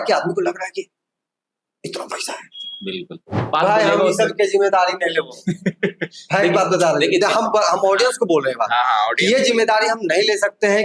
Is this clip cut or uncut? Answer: cut